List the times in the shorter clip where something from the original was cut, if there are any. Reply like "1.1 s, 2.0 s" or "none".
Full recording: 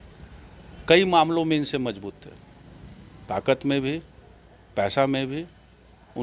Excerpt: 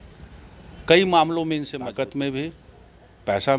1.8 s